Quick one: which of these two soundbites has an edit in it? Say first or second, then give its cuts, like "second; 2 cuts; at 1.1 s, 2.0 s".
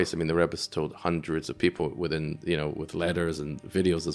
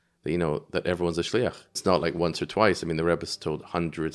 second; 1 cut; at 1.8 s